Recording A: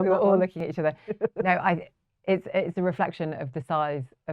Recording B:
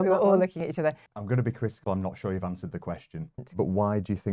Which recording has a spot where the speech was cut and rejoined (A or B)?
B